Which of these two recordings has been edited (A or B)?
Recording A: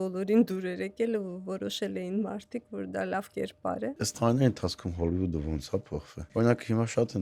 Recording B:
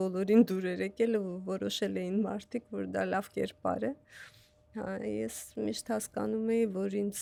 A